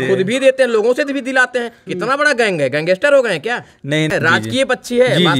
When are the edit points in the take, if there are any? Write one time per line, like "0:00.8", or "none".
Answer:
0:04.1

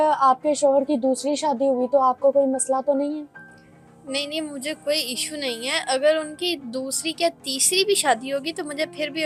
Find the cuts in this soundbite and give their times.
none

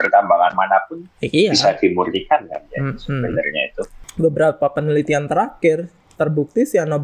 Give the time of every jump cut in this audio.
0:04.0

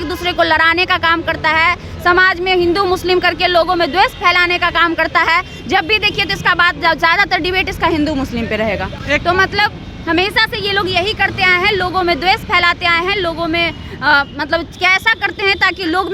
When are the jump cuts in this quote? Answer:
none

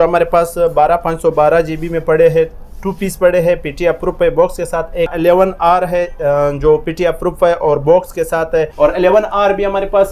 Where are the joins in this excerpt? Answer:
0:05.1
0:08.7

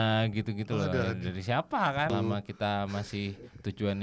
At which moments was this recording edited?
0:02.1

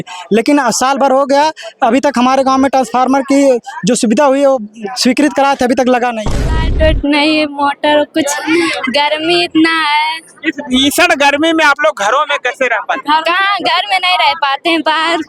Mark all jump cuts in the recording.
0:06.4

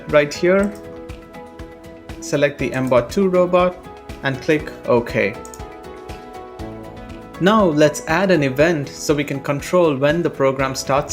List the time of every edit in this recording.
0:00.7
0:02.3

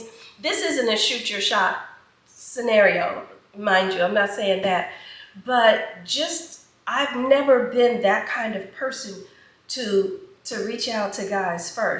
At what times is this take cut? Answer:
none

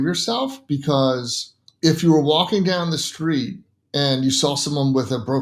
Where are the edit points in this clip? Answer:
none

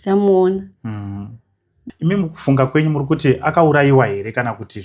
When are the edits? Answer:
0:01.8

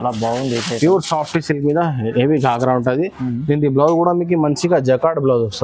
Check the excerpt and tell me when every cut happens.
none

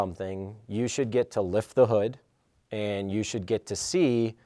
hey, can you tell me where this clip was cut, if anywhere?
none

